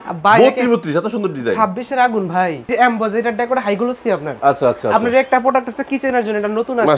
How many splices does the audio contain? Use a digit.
1